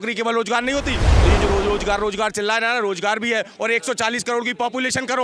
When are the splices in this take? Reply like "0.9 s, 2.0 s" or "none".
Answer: 1.1 s